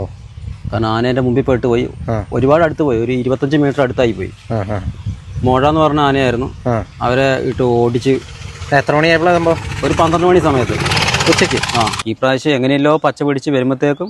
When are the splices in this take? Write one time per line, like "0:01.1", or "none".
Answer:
0:12.0